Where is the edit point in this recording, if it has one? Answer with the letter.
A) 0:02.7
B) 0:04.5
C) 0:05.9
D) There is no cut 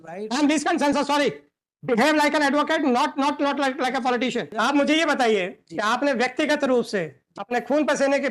B